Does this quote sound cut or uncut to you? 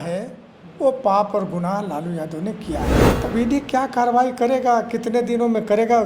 cut